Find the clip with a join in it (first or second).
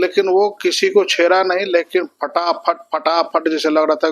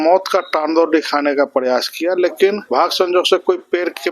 second